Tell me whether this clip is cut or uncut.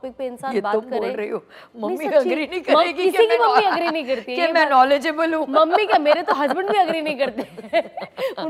uncut